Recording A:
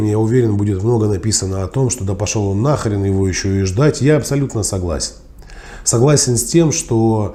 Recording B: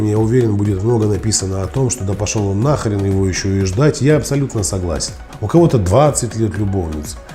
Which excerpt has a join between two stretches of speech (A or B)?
B